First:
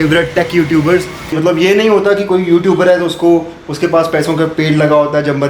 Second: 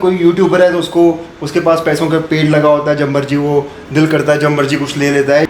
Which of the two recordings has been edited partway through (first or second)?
first